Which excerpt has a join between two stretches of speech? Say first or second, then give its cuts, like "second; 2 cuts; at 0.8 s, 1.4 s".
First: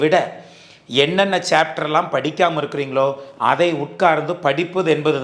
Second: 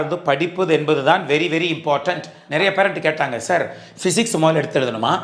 second; 1 cut; at 2.4 s